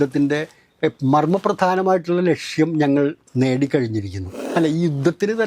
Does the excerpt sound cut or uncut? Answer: cut